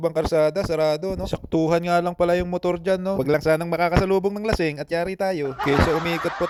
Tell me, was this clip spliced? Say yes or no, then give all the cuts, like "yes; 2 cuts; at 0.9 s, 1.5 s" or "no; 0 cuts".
no; 0 cuts